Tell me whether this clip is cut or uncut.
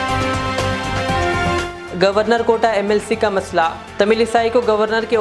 cut